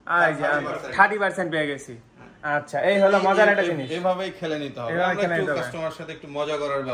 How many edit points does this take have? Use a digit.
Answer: 0